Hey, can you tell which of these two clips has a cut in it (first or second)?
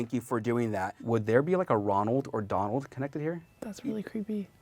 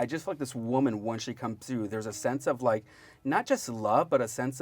first